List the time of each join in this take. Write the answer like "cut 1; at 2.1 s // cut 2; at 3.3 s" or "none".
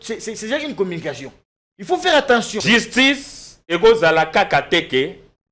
cut 1; at 2.5 s